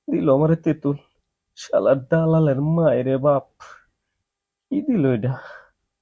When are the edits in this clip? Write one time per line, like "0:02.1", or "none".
none